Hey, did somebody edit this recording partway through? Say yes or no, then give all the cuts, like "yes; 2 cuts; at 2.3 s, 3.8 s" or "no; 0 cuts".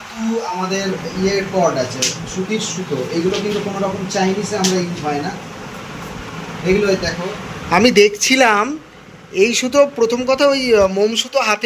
no; 0 cuts